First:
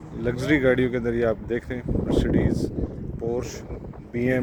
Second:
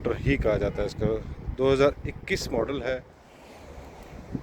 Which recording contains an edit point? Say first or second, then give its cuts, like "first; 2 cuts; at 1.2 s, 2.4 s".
second; 1 cut; at 3.2 s